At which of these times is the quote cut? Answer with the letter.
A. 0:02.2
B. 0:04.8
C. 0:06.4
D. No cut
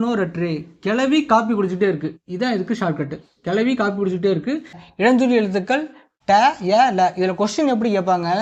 B